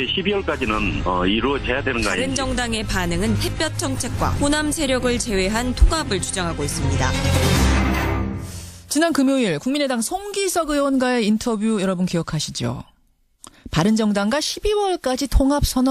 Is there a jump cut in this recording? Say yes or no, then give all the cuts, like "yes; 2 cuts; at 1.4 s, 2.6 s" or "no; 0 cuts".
no; 0 cuts